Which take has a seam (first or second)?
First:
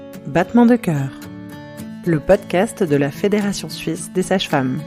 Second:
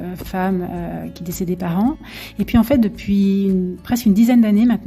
second